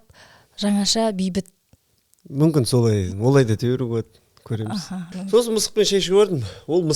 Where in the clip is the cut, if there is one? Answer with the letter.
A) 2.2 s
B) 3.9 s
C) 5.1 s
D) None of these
C